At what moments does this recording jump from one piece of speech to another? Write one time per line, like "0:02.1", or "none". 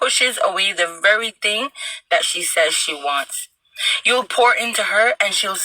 0:03.4